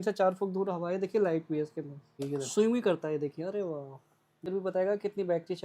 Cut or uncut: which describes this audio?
cut